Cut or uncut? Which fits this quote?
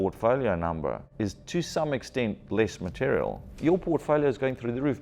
cut